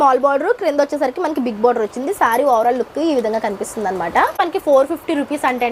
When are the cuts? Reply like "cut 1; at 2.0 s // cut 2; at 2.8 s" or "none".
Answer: cut 1; at 4.4 s